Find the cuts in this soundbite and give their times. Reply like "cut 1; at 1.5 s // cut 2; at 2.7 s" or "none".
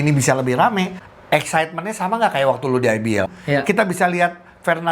cut 1; at 1.0 s // cut 2; at 3.3 s